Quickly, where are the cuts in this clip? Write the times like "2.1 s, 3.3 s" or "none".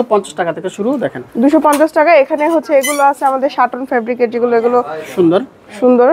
none